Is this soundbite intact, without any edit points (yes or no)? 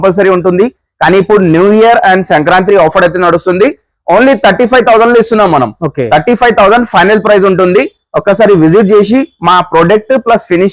yes